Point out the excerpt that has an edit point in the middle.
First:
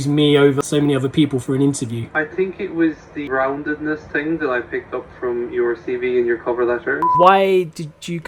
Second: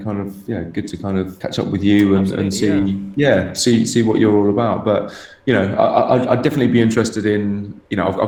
first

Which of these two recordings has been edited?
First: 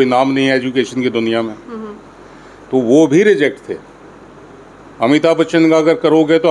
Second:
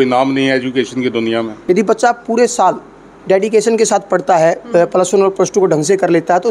second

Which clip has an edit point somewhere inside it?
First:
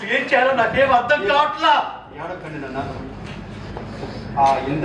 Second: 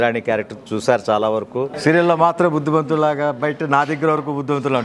second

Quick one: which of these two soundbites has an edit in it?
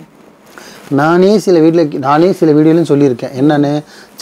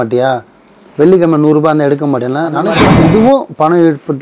second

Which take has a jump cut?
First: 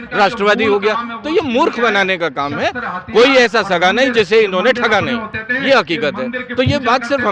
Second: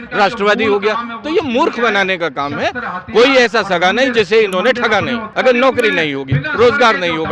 second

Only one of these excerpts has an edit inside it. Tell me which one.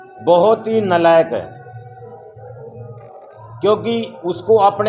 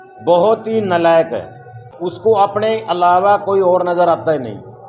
second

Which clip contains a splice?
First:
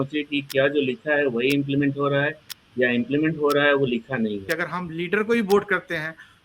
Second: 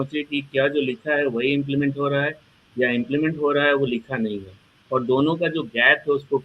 first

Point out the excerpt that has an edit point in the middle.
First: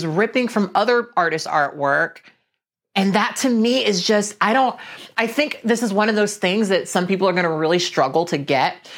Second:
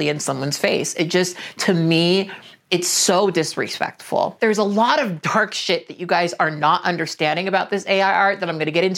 second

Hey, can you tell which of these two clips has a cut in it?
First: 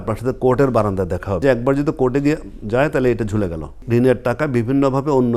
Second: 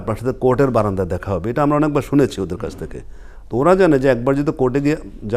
first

